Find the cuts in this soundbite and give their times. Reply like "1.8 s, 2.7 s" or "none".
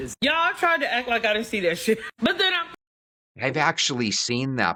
none

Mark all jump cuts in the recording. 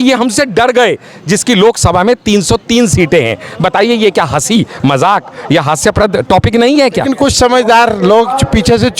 7.3 s

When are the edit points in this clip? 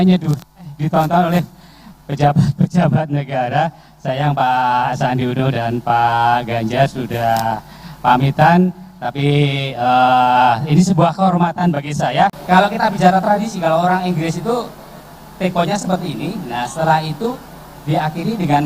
12.4 s

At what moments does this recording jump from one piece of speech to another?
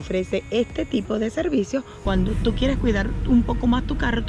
2.0 s

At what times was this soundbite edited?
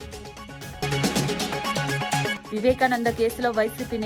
0.8 s, 2.3 s

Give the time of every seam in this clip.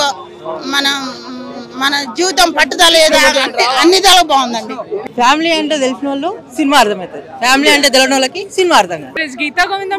4.9 s, 9.1 s

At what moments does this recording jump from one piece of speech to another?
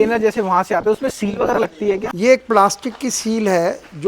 2.1 s

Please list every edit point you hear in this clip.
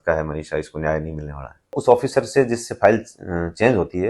1.8 s

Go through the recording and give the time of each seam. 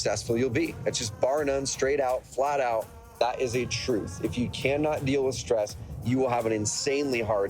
5.4 s

